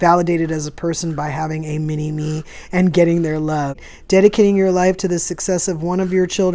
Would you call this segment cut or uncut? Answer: cut